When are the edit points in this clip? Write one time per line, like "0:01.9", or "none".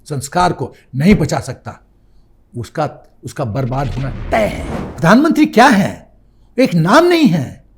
0:04.7